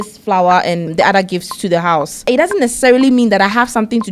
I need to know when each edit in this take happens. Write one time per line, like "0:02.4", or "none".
0:00.9
0:02.3